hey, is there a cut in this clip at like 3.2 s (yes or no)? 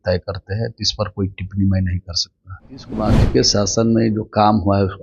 yes